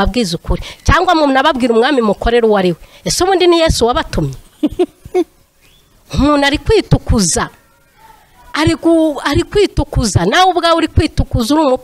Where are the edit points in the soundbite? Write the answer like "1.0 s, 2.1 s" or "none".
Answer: none